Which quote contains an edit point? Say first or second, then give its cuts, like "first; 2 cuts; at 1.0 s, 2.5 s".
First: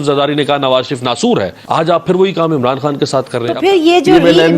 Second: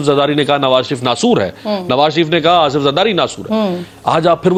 first; 2 cuts; at 1.5 s, 3.5 s